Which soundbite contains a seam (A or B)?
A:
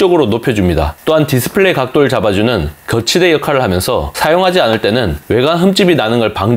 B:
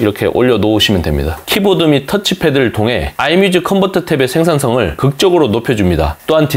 B